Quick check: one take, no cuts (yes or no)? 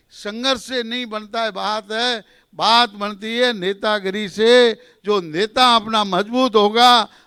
yes